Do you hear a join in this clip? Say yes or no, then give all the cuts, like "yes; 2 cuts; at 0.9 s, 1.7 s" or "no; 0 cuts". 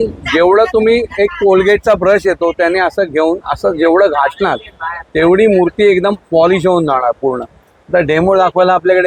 no; 0 cuts